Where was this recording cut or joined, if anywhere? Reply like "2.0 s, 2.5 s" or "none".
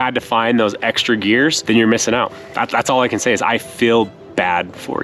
1.6 s